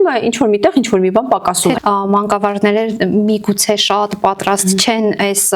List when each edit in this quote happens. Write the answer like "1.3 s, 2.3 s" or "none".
1.8 s